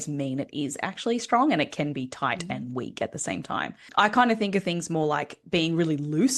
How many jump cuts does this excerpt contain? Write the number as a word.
one